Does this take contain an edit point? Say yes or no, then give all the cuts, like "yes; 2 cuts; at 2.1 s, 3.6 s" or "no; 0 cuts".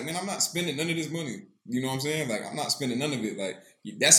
no; 0 cuts